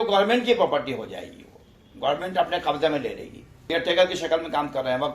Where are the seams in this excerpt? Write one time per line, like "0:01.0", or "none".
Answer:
0:03.6